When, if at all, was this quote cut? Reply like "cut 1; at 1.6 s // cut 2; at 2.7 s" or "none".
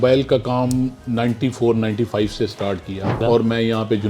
cut 1; at 3.2 s